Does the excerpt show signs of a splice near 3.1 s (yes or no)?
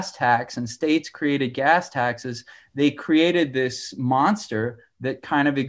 no